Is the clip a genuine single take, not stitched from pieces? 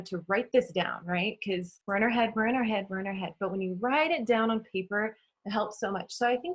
no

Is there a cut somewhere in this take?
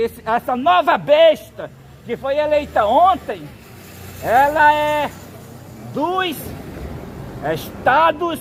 no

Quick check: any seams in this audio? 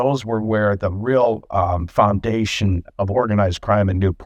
no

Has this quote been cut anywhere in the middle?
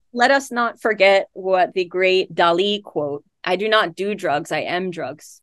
yes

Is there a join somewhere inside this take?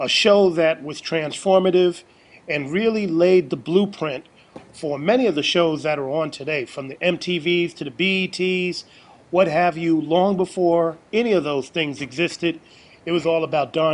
yes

